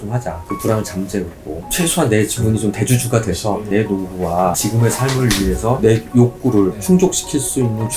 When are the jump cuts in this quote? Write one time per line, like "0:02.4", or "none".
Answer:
0:04.6